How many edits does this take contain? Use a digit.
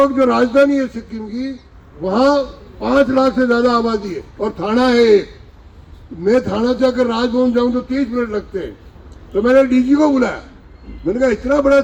0